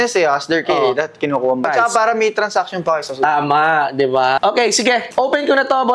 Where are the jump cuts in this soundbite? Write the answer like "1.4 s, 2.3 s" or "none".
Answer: 1.7 s, 4.4 s

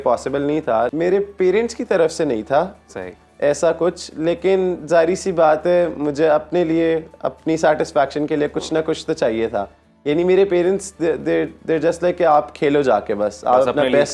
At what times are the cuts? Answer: 0.9 s

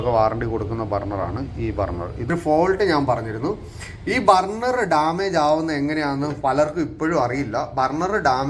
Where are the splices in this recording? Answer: 2.3 s

